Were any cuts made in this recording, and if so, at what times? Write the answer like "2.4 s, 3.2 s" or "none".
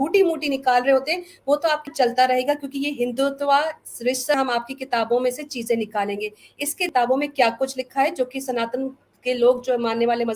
1.9 s, 4.3 s, 6.8 s